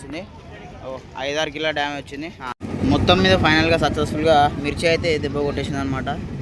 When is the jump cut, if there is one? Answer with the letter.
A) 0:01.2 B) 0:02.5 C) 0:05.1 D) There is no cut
B